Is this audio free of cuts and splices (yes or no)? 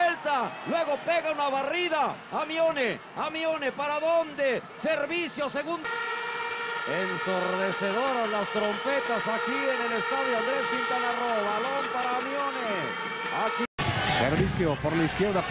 no